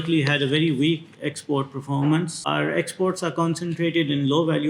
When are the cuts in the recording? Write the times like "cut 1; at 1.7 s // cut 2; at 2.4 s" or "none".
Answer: cut 1; at 2.4 s